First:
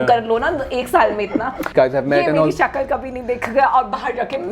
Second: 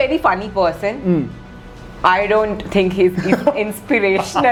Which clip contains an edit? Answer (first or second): first